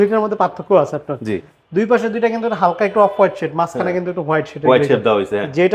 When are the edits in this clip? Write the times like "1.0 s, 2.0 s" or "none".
none

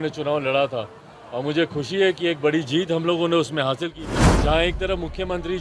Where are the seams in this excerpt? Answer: 4.0 s

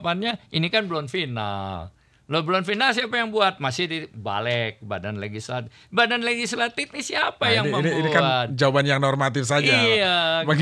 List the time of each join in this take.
none

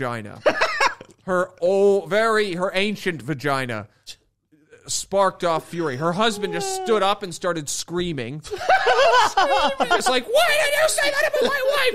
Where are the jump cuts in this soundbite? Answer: none

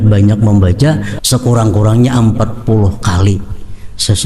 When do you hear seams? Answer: 1.1 s

